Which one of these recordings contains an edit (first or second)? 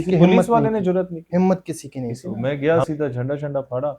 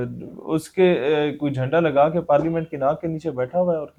first